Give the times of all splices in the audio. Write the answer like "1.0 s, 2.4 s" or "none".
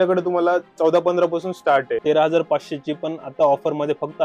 2.0 s